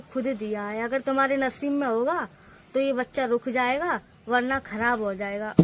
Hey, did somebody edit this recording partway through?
no; 0 cuts

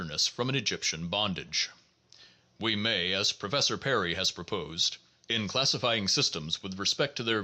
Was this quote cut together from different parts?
yes; 1 cut; at 4.9 s

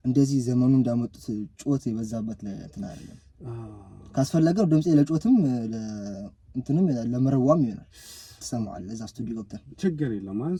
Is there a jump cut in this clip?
no; 0 cuts

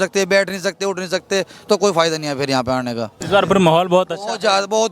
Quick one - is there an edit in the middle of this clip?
yes; 1 cut; at 3.2 s

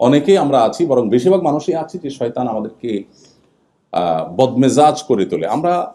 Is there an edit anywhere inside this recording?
no; 0 cuts

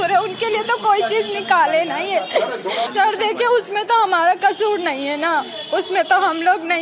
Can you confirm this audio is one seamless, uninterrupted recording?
no; 1 cut; at 2.9 s

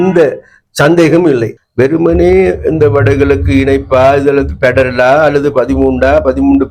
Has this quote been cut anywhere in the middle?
yes; 1 cut; at 1.6 s

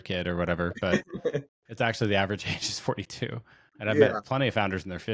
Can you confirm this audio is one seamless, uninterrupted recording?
yes; 0 cuts

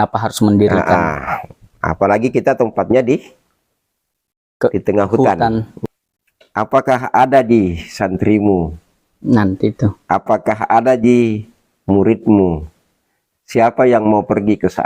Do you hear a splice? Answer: yes; 1 cut; at 5.7 s

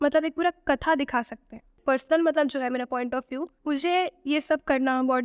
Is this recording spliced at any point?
yes; 2 cuts; at 1.7 s, 3.5 s

